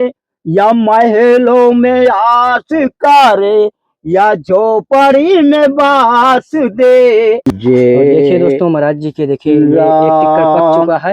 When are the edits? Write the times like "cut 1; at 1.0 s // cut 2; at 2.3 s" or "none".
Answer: cut 1; at 7.5 s